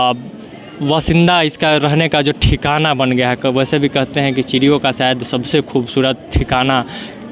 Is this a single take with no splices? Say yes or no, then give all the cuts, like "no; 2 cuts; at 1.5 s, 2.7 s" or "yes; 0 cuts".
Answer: yes; 0 cuts